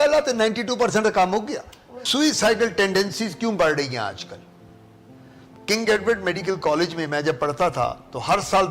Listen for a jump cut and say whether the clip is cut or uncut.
cut